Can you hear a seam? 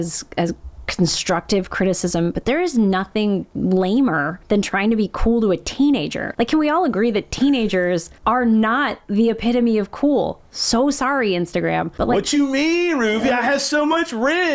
no; 0 cuts

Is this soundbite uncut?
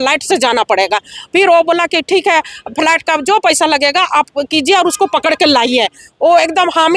yes; 0 cuts

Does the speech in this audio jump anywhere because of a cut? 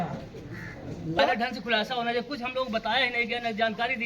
yes; 1 cut; at 1.2 s

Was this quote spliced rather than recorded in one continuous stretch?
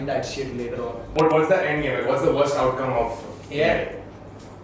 yes; 1 cut; at 1.2 s

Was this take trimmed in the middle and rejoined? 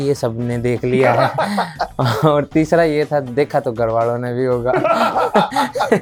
no; 0 cuts

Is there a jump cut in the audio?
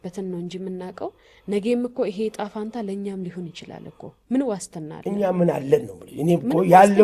no; 0 cuts

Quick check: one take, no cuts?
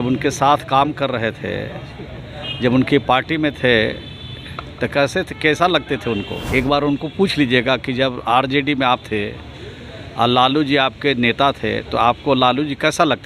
no; 1 cut; at 6.4 s

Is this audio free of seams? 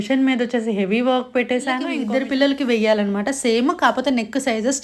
no; 1 cut; at 2.0 s

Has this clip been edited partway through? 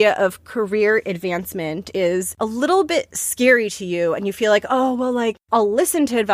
yes; 2 cuts; at 1.9 s, 5.4 s

